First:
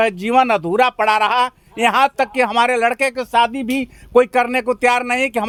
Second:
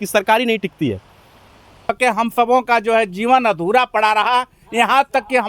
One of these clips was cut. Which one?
second; 1 cut; at 2.0 s

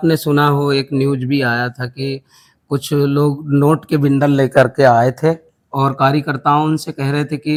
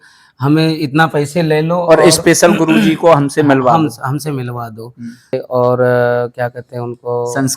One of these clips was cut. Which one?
second; 1 cut; at 5.4 s

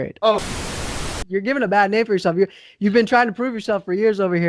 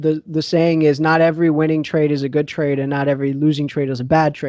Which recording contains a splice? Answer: first; 1 cut; at 1.0 s

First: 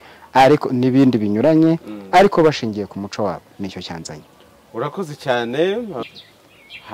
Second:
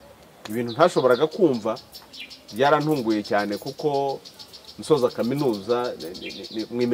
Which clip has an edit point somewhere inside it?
first; 1 cut; at 6.0 s

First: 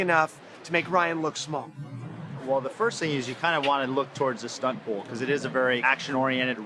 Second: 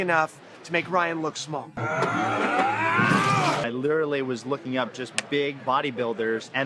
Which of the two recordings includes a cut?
second; 2 cuts; at 1.7 s, 3.6 s

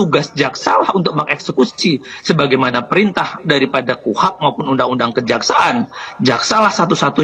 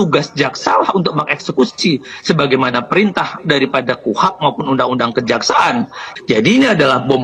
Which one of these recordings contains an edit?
second; 1 cut; at 6.0 s

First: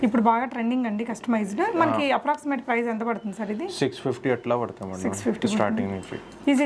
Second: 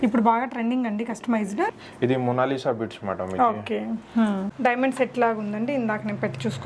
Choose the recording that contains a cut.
second; 2 cuts; at 1.7 s, 4.5 s

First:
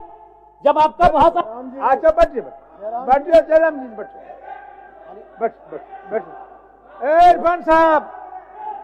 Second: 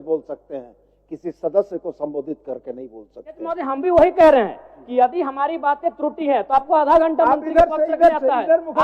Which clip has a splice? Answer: second; 1 cut; at 3.6 s

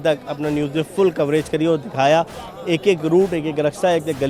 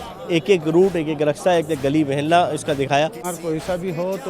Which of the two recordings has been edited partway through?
second; 1 cut; at 3.3 s

